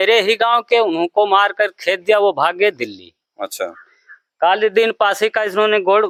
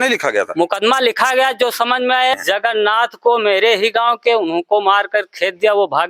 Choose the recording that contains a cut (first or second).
second